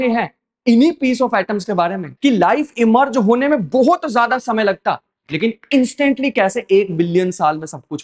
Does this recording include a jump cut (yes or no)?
yes